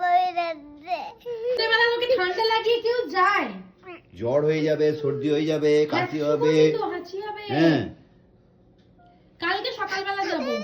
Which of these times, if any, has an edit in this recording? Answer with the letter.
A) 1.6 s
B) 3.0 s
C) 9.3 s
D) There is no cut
A